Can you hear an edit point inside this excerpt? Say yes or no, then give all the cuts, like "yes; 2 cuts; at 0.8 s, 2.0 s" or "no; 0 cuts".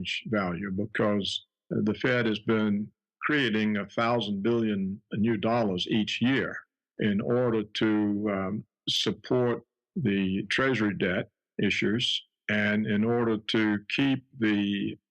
yes; 1 cut; at 8.0 s